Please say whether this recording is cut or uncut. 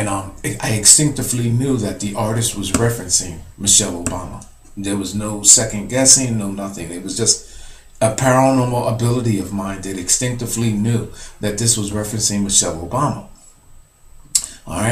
uncut